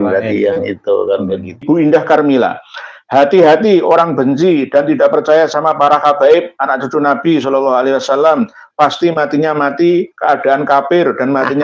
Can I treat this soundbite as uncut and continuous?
no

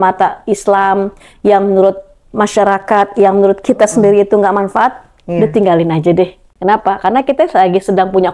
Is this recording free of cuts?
no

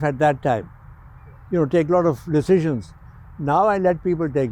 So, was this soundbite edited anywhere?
no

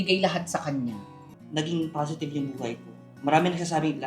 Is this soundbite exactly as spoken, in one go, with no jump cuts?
no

